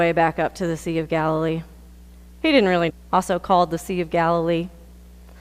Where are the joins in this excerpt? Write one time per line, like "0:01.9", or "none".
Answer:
none

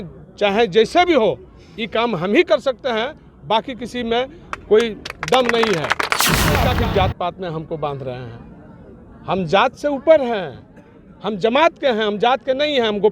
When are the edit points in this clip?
0:06.6

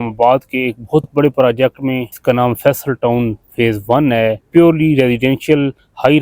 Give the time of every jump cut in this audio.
0:02.1
0:04.5

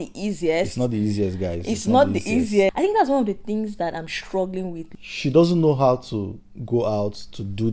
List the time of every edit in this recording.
0:02.7
0:04.8

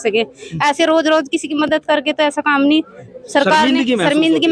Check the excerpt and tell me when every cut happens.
none

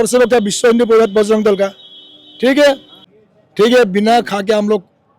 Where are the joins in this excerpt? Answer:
0:02.9

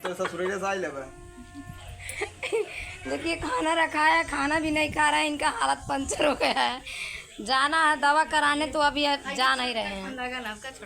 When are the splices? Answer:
none

